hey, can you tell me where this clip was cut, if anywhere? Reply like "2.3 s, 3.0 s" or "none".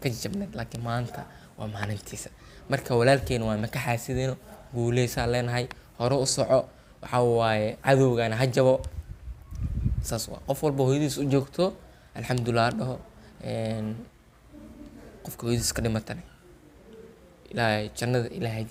none